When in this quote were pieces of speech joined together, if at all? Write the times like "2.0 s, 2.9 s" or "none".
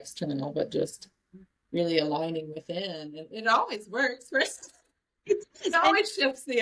none